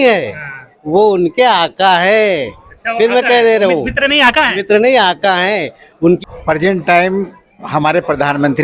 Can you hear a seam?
yes; 1 cut; at 6.2 s

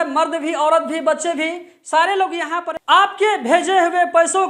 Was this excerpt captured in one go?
no; 1 cut; at 2.7 s

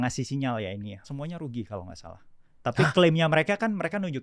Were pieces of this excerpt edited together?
yes; 1 cut; at 1.1 s

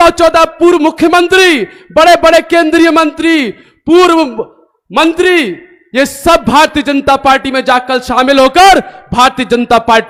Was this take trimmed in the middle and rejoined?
no; 0 cuts

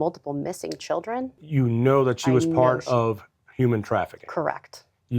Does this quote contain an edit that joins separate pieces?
yes; 1 cut; at 1.4 s

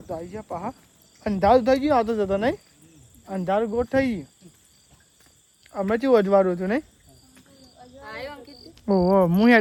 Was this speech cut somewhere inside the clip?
no; 0 cuts

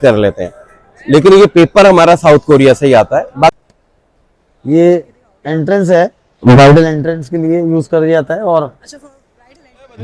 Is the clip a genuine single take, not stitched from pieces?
no; 1 cut; at 3.5 s

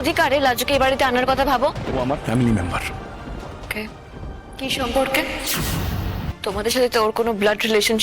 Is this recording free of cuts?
no; 2 cuts; at 1.8 s, 6.2 s

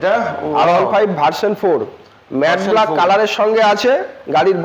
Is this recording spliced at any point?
no; 0 cuts

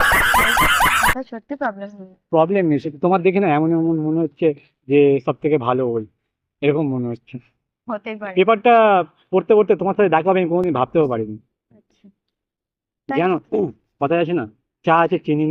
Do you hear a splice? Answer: no; 0 cuts

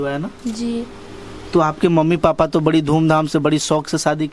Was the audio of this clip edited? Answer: no; 0 cuts

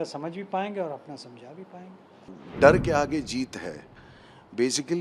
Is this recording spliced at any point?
yes; 1 cut; at 2.4 s

